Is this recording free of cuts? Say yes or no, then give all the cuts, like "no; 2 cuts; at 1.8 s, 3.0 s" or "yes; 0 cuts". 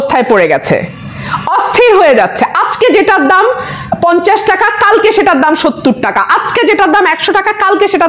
yes; 0 cuts